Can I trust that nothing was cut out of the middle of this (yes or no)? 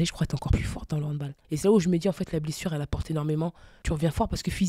no